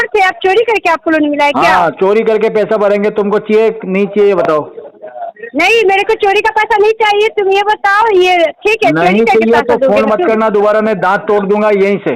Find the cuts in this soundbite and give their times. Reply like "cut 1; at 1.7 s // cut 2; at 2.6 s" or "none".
none